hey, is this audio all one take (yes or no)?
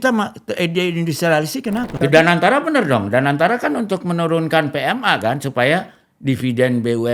no